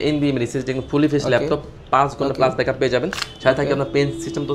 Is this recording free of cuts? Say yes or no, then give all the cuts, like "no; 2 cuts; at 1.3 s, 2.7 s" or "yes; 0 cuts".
yes; 0 cuts